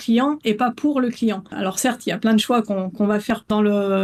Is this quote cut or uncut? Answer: uncut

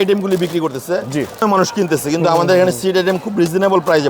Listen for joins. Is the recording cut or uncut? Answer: cut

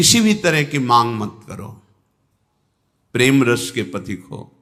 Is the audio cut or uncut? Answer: uncut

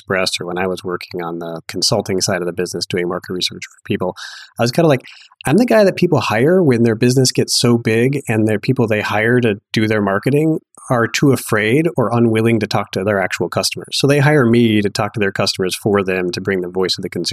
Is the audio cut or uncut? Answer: uncut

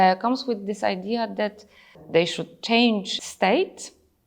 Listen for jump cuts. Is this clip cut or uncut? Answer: cut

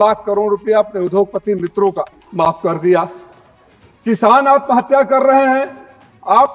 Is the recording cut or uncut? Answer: cut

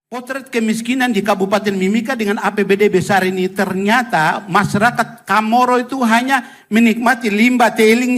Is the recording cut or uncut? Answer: uncut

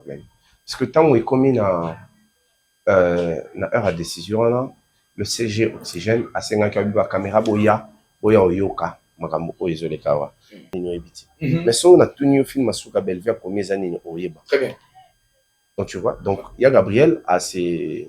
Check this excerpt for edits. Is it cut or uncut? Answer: cut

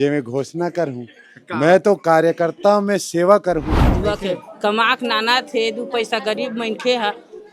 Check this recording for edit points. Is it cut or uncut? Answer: cut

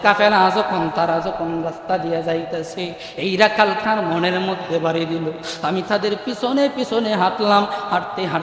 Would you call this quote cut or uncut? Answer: uncut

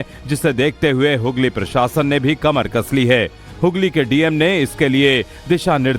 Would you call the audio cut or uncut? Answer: cut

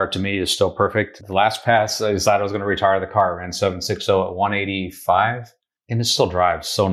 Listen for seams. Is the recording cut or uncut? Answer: cut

